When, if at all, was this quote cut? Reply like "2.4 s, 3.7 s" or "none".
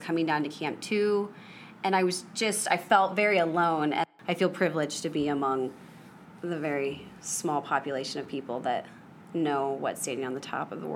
4.1 s